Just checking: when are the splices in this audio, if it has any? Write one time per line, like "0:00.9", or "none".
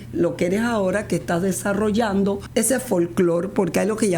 0:02.4